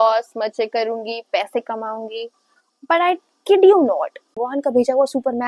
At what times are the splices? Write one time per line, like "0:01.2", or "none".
0:04.4